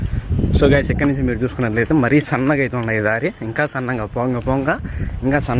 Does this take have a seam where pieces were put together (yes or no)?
no